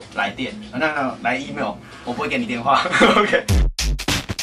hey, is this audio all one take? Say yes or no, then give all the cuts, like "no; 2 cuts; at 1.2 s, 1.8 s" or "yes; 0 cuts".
no; 1 cut; at 3.5 s